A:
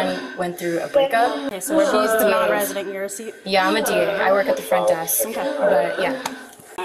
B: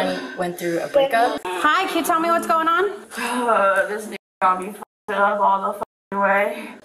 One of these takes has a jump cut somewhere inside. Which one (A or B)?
B